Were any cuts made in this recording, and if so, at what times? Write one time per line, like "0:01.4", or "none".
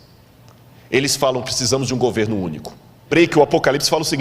0:03.1